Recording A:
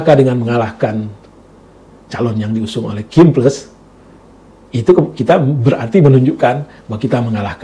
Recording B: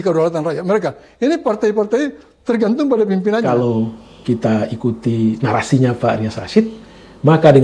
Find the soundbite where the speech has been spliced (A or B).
B